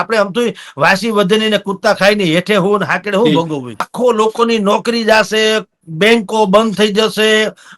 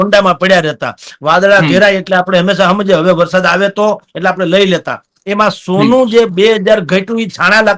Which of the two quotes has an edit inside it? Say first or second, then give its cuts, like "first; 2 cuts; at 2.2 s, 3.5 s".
first; 1 cut; at 3.9 s